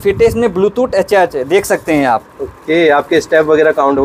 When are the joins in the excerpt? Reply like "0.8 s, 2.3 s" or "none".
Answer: none